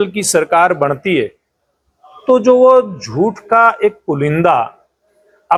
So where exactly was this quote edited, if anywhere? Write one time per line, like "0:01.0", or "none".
none